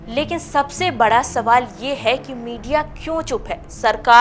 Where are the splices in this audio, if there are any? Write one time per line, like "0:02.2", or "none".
none